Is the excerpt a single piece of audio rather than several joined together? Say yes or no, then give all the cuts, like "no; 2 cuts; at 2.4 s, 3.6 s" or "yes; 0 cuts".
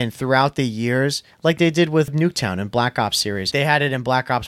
no; 2 cuts; at 2.1 s, 3.5 s